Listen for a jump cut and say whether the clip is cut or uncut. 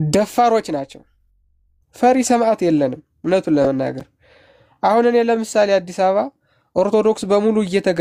uncut